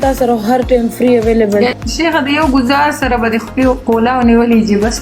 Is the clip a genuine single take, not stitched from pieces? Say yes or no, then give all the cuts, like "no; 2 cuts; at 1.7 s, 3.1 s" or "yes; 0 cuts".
no; 1 cut; at 1.8 s